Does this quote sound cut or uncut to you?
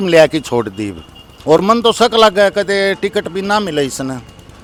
uncut